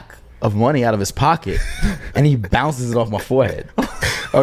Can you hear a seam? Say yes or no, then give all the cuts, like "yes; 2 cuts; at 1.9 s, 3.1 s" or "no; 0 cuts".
no; 0 cuts